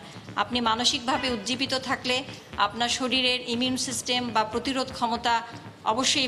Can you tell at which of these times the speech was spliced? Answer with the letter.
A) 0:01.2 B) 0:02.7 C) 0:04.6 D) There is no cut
D